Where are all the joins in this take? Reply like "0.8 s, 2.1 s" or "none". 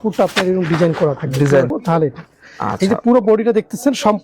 1.7 s